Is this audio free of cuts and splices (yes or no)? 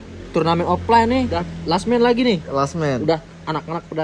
no